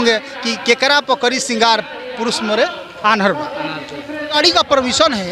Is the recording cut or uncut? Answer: cut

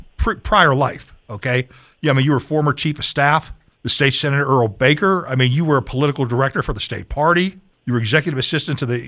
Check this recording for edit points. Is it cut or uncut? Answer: uncut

